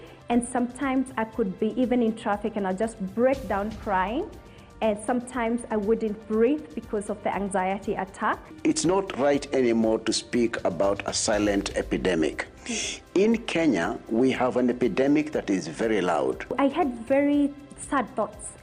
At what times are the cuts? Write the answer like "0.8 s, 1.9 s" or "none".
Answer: 8.5 s, 16.5 s